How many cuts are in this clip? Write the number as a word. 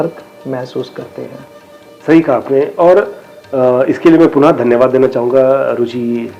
zero